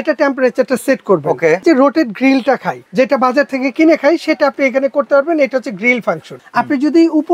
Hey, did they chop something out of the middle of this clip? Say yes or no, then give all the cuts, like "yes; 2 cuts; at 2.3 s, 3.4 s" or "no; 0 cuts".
yes; 3 cuts; at 1.6 s, 2.8 s, 6.3 s